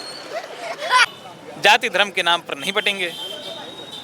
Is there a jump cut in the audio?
yes; 1 cut; at 1.1 s

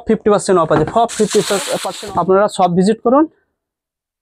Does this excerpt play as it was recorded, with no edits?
no; 1 cut; at 1.8 s

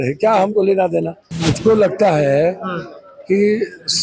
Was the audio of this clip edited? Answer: yes; 1 cut; at 1.2 s

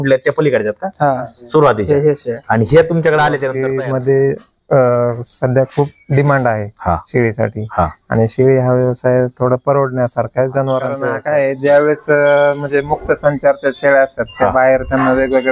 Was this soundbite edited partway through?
yes; 2 cuts; at 3.6 s, 11.1 s

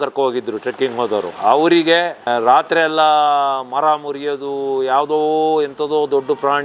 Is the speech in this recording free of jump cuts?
yes; 0 cuts

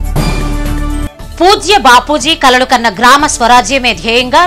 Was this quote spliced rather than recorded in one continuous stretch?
yes; 1 cut; at 1.1 s

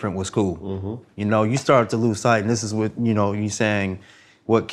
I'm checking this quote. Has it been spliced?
no; 0 cuts

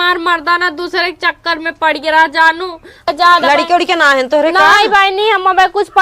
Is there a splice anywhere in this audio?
yes; 1 cut; at 3.1 s

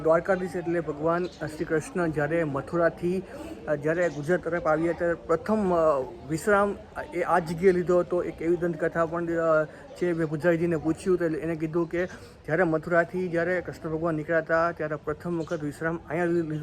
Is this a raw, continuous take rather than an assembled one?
yes; 0 cuts

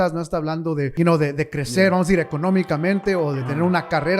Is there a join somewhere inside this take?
yes; 1 cut; at 0.9 s

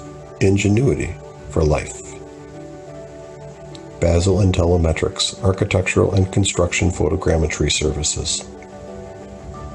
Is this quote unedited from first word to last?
yes; 0 cuts

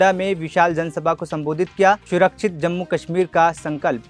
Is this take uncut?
yes; 0 cuts

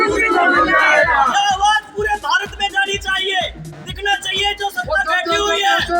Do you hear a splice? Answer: no; 0 cuts

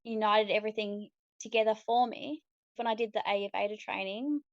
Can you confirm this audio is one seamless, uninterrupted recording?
no; 1 cut; at 2.8 s

